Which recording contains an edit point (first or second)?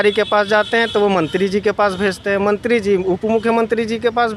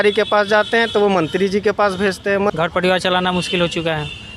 second